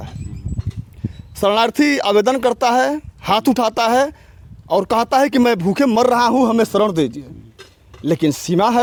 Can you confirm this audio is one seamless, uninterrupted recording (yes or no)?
yes